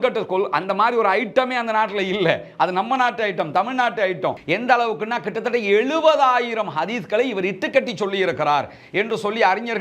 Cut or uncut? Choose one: cut